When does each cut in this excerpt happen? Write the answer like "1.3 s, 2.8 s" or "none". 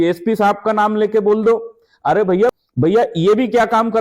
2.5 s